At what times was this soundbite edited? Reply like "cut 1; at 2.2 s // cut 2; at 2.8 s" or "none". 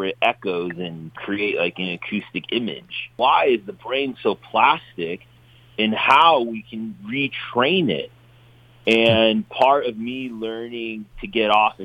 cut 1; at 1.2 s // cut 2; at 3.0 s